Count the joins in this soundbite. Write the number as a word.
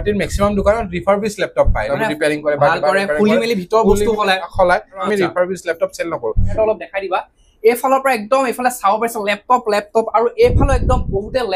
three